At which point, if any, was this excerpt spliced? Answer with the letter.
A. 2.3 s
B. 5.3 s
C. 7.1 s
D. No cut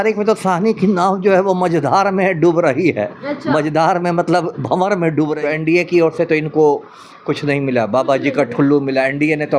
B